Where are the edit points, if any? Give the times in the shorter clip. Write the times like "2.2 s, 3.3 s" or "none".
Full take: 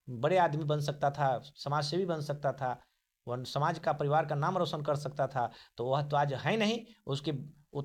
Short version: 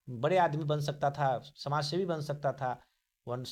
none